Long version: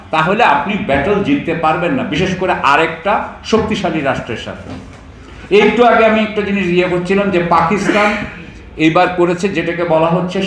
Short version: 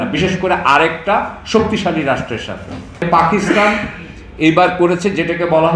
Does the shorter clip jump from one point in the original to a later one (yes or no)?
yes